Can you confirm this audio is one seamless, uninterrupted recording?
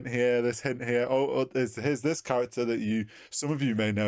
yes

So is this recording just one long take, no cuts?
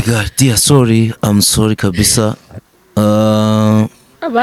yes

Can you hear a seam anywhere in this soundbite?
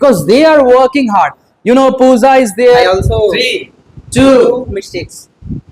yes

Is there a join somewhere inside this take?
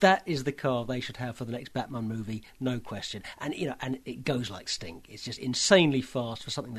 no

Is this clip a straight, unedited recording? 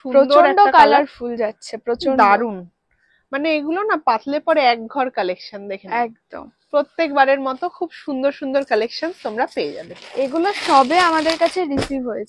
yes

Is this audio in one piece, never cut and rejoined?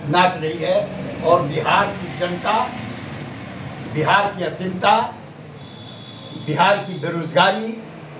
yes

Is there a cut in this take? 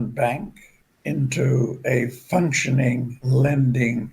yes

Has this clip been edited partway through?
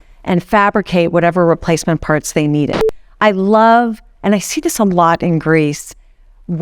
yes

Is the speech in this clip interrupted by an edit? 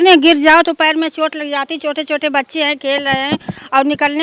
no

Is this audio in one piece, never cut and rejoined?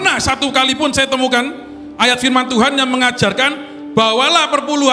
yes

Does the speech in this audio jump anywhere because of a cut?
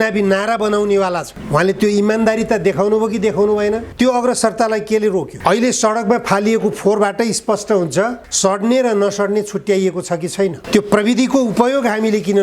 yes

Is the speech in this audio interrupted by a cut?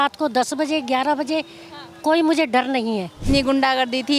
yes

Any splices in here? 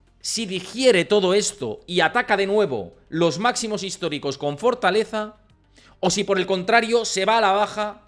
no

